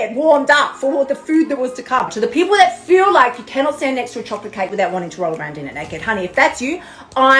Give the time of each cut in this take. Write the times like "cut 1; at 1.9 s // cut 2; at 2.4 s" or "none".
cut 1; at 2.1 s